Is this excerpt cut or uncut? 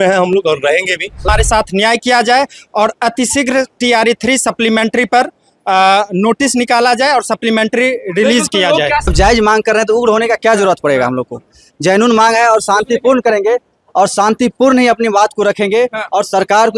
cut